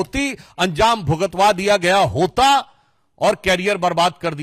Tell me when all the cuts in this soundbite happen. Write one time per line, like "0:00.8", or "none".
none